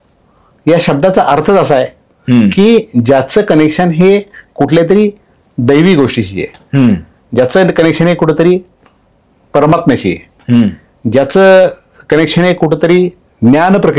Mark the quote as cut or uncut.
uncut